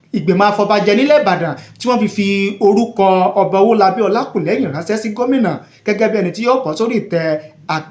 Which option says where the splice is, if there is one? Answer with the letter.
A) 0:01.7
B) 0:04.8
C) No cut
C